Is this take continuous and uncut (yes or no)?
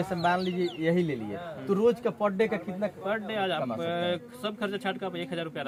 yes